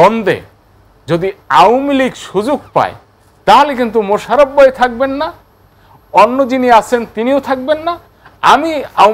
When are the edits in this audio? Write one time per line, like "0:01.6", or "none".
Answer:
none